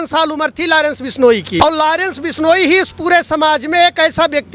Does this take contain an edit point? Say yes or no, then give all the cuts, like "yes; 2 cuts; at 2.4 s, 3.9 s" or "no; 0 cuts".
yes; 1 cut; at 1.6 s